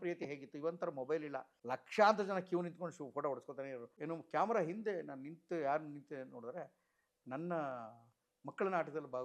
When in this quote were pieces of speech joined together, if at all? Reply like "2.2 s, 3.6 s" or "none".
1.5 s, 3.9 s